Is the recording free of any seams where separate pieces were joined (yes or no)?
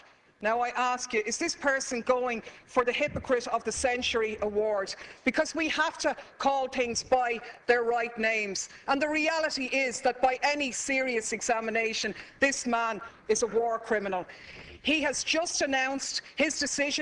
yes